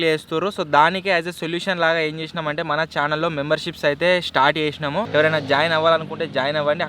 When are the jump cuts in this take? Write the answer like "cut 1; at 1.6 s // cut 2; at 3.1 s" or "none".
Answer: cut 1; at 5.1 s